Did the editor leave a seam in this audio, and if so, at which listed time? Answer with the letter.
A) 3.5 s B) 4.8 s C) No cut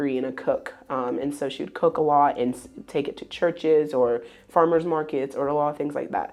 C